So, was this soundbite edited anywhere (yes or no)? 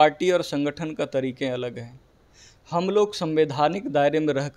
no